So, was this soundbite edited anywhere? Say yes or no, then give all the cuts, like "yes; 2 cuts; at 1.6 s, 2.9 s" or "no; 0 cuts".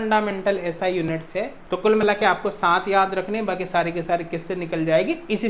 yes; 1 cut; at 1.6 s